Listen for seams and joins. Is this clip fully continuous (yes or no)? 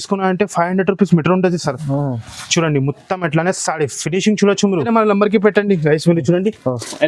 no